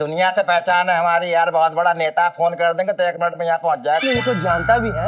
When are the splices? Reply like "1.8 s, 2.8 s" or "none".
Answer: 4.0 s